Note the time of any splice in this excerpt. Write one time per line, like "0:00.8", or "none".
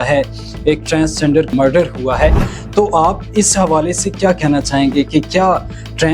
0:01.5